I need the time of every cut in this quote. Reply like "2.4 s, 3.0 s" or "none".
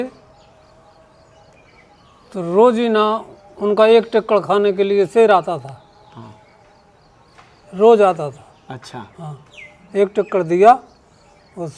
none